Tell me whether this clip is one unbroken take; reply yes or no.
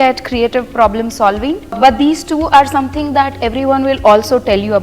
no